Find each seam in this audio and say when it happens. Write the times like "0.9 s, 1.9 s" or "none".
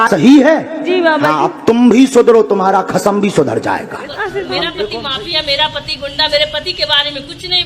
5.0 s